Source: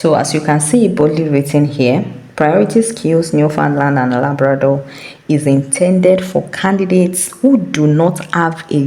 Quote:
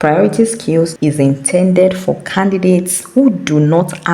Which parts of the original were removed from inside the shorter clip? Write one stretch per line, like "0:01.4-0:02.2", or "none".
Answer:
0:03.3-0:05.2